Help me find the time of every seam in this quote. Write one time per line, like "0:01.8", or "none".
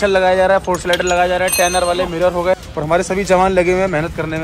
0:02.6